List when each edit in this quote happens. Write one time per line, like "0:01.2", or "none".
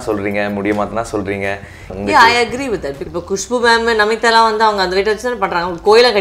0:01.9
0:02.9